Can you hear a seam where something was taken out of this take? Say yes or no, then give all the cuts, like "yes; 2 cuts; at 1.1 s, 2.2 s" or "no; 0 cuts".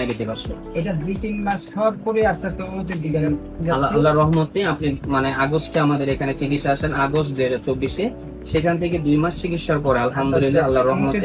no; 0 cuts